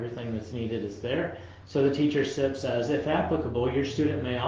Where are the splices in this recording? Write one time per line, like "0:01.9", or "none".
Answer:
none